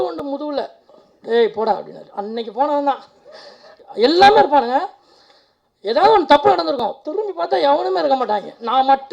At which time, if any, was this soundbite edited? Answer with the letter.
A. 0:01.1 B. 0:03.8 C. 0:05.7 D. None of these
B